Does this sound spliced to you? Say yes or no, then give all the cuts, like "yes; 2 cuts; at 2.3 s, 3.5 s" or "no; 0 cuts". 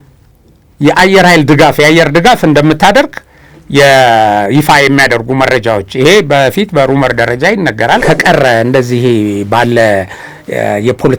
yes; 1 cut; at 8.0 s